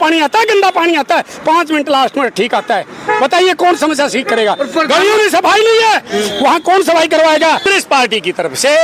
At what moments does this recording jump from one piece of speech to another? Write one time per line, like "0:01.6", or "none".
0:07.7